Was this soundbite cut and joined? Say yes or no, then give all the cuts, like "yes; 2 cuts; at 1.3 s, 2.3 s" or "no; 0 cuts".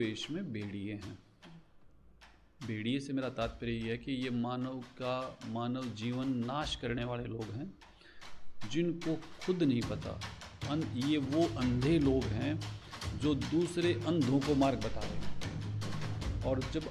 no; 0 cuts